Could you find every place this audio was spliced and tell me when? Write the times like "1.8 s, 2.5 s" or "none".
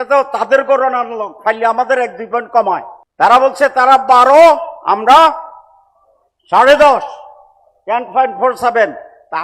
3.0 s